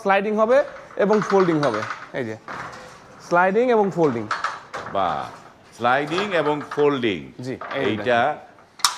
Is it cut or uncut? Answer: uncut